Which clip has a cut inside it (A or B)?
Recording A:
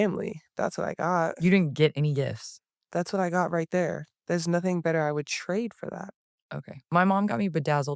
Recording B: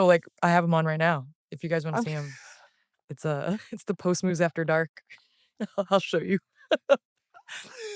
A